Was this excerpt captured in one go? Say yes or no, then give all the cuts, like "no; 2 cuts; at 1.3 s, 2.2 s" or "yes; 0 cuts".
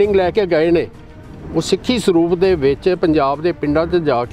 yes; 0 cuts